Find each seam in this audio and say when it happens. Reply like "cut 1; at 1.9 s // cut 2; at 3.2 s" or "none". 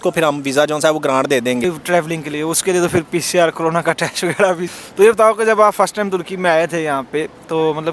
cut 1; at 1.6 s // cut 2; at 4.7 s